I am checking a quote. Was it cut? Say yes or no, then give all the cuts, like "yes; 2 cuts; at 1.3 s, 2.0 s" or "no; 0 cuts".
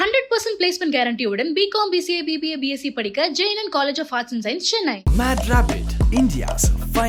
no; 0 cuts